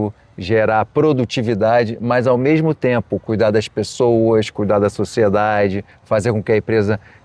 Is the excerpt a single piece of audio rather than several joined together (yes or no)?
yes